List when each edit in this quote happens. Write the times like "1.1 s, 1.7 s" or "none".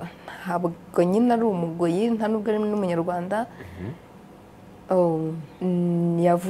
5.5 s